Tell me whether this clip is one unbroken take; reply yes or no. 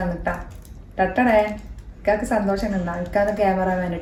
yes